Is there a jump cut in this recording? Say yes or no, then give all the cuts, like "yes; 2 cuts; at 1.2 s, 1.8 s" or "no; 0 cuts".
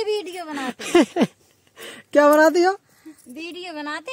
no; 0 cuts